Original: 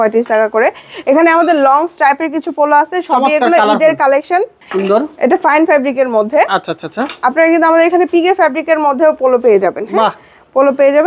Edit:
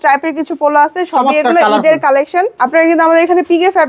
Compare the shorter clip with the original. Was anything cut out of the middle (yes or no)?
yes